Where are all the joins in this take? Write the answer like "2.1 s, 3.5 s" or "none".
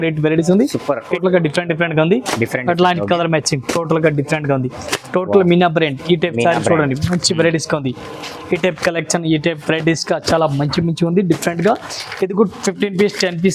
1.1 s